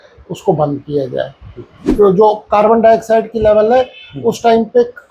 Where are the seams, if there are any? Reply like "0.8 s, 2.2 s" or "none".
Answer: 1.8 s